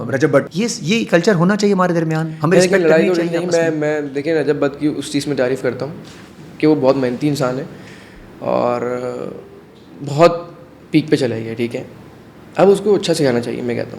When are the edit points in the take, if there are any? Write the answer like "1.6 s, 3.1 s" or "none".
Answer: none